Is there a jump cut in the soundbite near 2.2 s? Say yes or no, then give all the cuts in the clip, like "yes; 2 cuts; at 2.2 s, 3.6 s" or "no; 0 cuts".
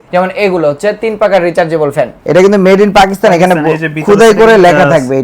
yes; 1 cut; at 2.2 s